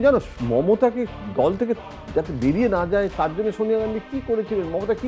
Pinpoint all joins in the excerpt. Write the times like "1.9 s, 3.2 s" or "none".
none

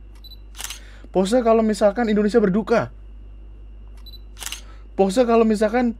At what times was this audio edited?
none

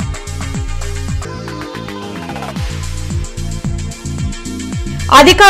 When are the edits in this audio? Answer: 4.6 s

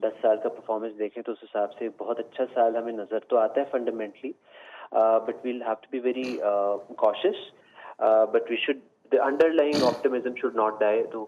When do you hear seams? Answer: none

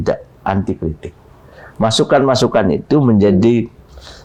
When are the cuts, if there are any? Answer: none

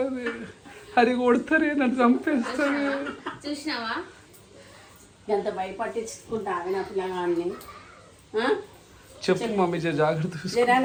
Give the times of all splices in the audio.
none

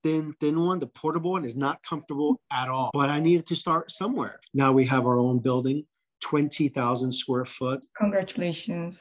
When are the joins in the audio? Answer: 2.9 s, 4.4 s, 7.8 s

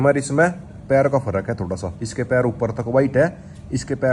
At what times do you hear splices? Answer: none

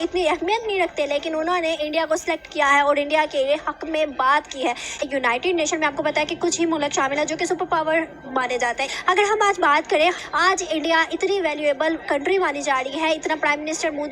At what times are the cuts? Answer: 4.9 s

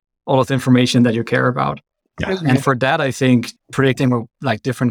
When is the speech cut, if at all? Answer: none

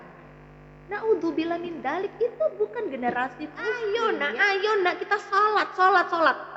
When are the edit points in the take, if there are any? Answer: 3.8 s

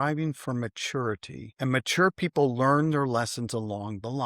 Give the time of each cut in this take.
1.5 s

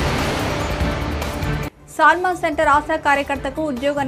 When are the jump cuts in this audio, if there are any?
none

